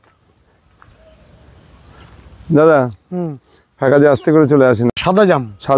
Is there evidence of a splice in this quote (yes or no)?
no